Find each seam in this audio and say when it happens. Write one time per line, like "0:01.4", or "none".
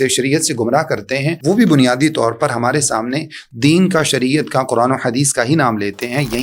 0:01.3